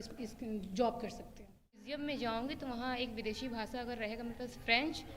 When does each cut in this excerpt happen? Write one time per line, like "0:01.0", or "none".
0:01.9